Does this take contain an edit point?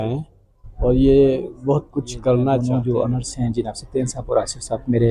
yes; 1 cut; at 2.7 s

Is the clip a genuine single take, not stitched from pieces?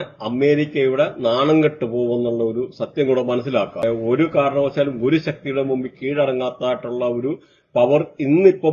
no; 1 cut; at 3.8 s

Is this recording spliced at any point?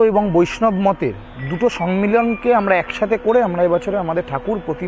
no; 0 cuts

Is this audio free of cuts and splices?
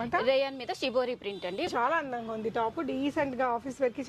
no; 1 cut; at 1.7 s

